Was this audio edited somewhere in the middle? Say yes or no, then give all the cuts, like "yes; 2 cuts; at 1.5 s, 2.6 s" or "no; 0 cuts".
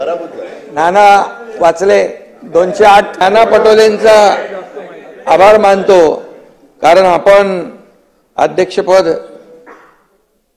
yes; 1 cut; at 3.1 s